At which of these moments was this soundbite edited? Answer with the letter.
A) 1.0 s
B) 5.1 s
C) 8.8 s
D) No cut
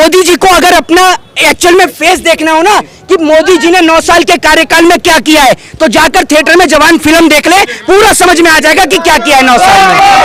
D